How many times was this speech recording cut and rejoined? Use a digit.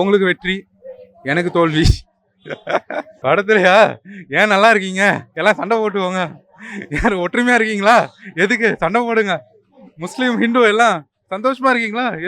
1